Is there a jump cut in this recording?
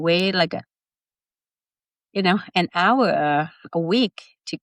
no; 0 cuts

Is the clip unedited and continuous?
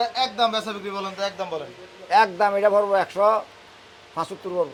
yes; 0 cuts

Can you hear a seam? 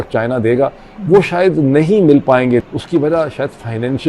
yes; 1 cut; at 2.6 s

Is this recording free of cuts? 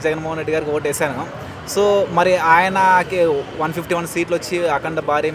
yes; 0 cuts

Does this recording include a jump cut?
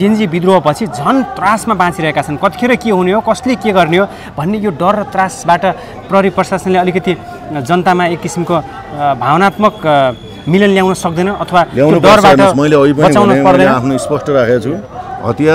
no; 0 cuts

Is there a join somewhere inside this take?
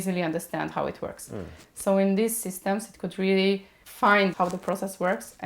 yes; 1 cut; at 4.1 s

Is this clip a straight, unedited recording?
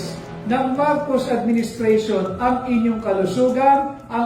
yes; 0 cuts

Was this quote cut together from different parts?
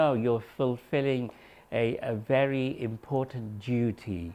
no; 0 cuts

